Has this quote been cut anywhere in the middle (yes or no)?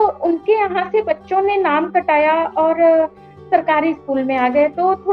no